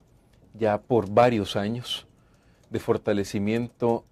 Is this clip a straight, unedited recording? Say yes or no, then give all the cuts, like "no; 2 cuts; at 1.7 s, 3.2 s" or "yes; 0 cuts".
yes; 0 cuts